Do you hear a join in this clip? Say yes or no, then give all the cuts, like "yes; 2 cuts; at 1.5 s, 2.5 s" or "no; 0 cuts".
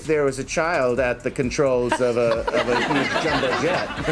no; 0 cuts